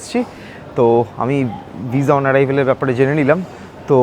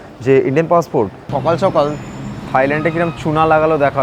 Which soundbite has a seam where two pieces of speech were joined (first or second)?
second